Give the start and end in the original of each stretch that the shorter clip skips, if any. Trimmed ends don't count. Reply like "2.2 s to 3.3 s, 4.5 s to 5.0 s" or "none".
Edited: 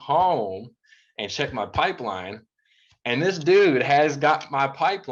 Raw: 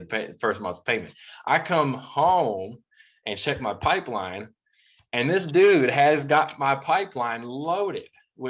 none